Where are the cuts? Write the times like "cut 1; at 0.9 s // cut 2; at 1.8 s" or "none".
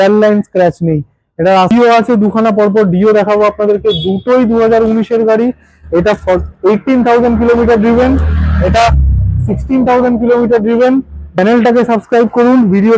cut 1; at 1.7 s // cut 2; at 11.2 s

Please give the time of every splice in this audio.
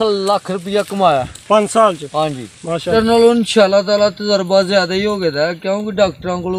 cut 1; at 2.9 s

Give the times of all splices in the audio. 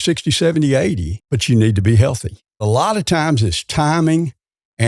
cut 1; at 1.1 s // cut 2; at 2.6 s

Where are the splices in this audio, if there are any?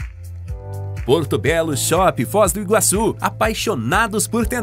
cut 1; at 1.0 s

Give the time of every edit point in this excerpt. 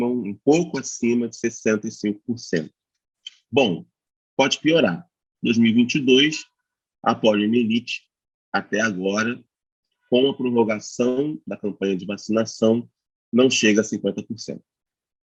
none

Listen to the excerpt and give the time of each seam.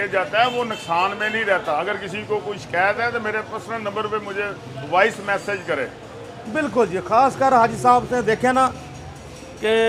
none

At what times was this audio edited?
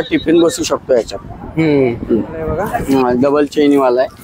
cut 1; at 2.7 s

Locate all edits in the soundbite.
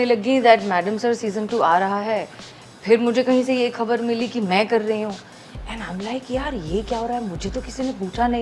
none

